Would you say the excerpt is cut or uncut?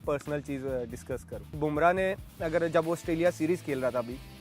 cut